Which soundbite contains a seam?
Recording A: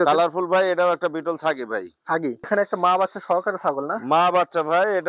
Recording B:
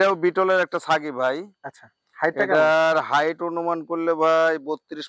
A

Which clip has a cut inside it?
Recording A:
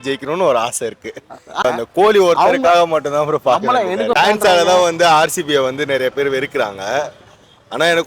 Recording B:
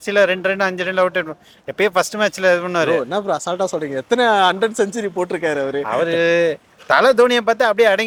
A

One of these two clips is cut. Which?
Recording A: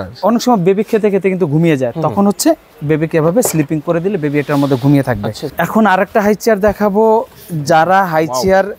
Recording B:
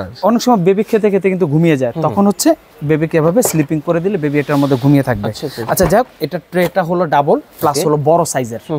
A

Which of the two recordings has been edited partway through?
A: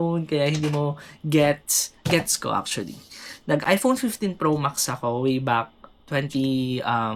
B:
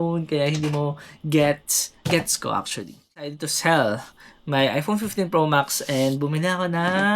B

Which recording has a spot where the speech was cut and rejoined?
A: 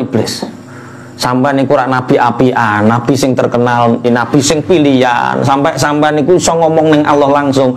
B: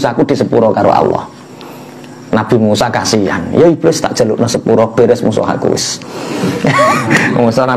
A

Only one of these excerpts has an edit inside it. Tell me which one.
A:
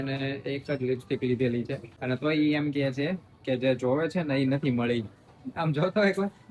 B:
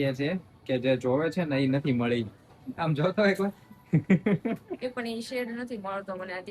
A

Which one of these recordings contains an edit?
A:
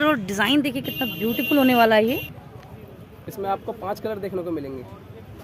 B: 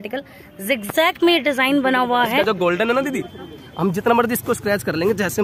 A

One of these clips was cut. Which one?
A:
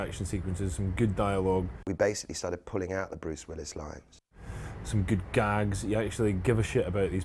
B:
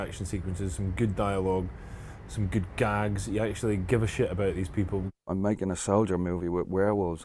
B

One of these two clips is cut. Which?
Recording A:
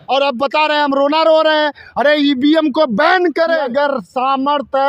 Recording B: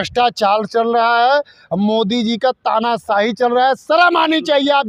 A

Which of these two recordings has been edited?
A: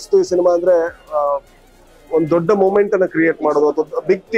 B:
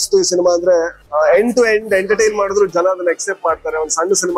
B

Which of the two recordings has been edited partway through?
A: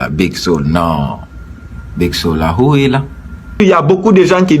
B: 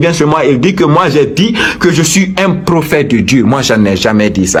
A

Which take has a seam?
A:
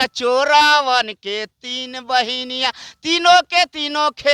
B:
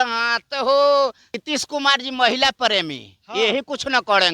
B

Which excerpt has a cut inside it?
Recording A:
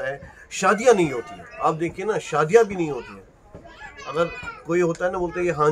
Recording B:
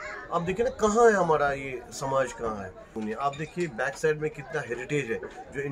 B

